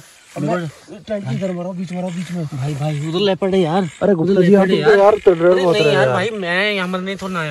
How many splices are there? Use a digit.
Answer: 0